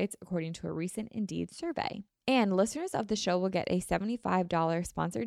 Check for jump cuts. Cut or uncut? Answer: cut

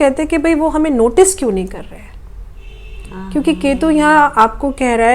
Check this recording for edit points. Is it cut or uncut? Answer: uncut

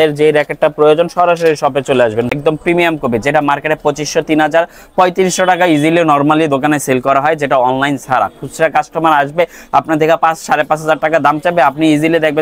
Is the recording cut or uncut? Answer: cut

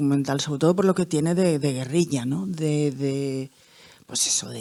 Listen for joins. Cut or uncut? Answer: uncut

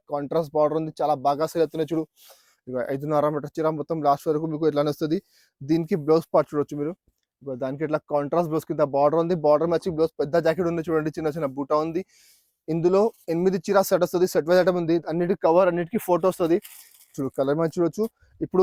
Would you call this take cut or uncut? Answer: uncut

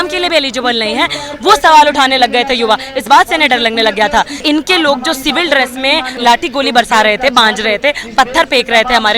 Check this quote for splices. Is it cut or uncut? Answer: cut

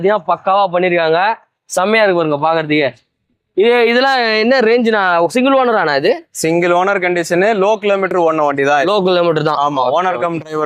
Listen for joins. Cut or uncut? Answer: uncut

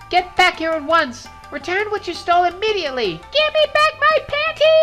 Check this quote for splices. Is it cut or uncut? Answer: uncut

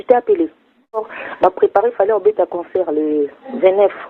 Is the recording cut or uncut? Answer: cut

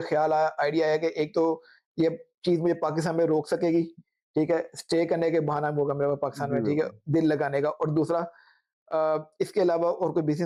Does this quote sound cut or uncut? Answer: uncut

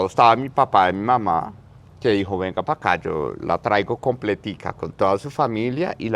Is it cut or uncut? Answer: uncut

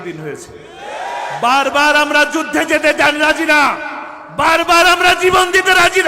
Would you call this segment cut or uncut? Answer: uncut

